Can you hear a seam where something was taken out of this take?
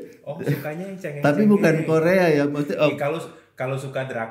yes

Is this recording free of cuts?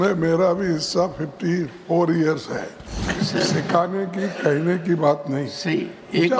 no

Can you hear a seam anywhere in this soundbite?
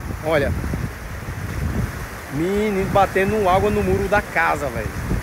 no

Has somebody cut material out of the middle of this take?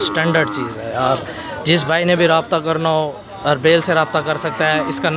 no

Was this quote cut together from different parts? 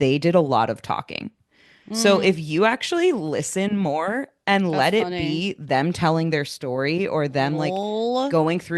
no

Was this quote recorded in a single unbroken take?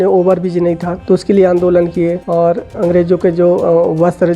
no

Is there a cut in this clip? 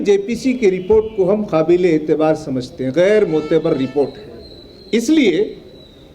no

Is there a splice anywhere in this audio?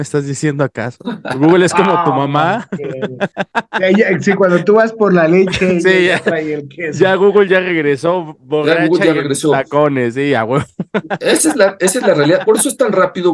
no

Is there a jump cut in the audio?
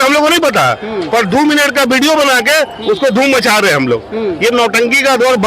no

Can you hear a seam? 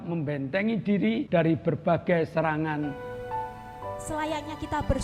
yes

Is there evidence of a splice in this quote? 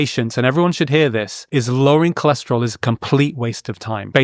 no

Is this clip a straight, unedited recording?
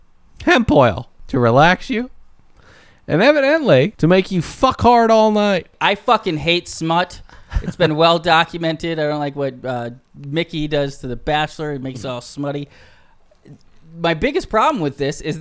no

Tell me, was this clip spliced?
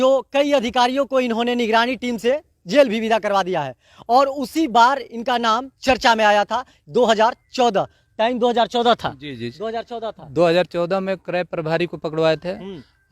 no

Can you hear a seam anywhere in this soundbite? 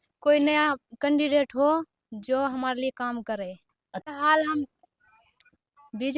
yes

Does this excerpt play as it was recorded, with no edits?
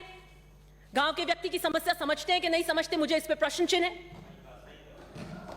yes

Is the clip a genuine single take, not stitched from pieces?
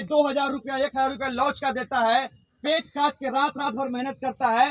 yes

